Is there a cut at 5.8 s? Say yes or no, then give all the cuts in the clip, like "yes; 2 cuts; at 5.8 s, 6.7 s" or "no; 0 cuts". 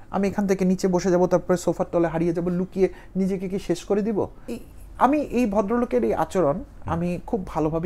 no; 1 cut; at 4.4 s